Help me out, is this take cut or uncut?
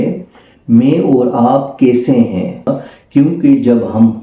cut